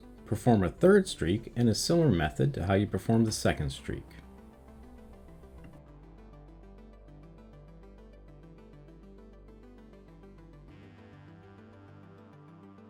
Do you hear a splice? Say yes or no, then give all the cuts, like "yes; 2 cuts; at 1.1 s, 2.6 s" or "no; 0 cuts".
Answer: no; 0 cuts